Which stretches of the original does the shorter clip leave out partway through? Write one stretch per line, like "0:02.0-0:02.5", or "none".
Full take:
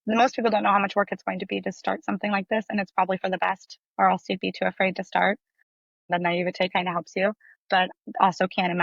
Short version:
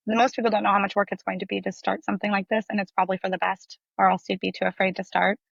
none